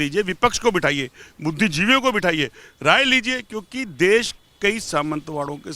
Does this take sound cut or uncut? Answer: uncut